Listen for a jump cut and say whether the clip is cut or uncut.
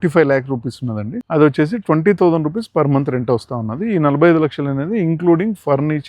cut